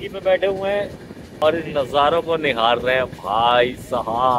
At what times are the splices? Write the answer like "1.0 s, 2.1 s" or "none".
1.4 s

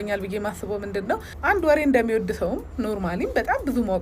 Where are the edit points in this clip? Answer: 1.3 s

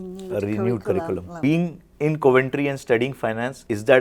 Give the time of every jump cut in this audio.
1.3 s

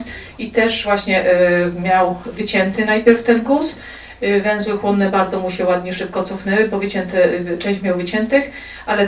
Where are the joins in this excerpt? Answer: none

